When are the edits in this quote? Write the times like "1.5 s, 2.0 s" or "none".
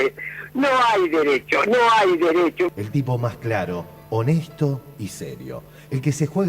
2.7 s